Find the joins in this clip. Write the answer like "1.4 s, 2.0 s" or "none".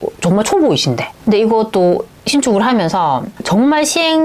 1.1 s, 3.3 s